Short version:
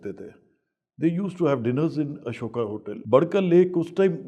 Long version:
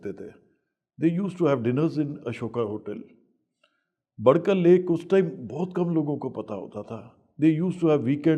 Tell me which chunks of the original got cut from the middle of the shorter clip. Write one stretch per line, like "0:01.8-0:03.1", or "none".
0:02.9-0:04.1